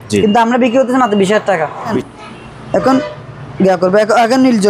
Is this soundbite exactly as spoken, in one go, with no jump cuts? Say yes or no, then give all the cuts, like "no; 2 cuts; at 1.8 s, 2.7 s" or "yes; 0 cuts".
no; 1 cut; at 2.0 s